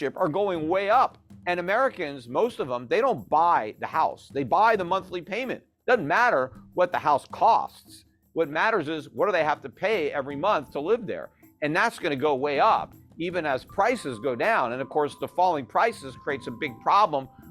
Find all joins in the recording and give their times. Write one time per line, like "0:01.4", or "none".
0:01.3